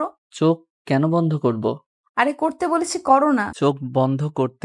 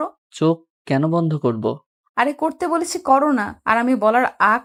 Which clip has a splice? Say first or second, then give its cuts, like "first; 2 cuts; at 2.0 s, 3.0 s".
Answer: first; 1 cut; at 3.5 s